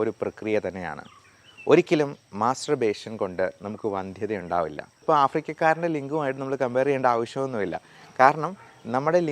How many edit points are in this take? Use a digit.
1